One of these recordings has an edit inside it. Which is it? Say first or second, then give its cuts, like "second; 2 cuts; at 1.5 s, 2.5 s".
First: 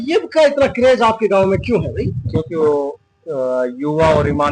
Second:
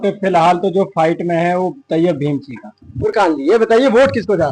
second; 1 cut; at 2.8 s